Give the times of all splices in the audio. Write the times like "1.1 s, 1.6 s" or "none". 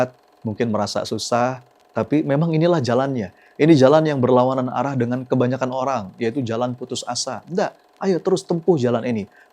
none